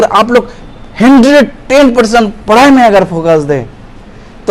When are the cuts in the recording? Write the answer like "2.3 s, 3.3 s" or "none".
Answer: none